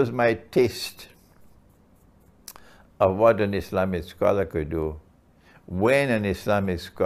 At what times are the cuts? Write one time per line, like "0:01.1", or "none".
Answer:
none